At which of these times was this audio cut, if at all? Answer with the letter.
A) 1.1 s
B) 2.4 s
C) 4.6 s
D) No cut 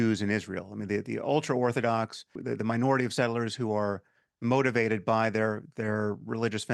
B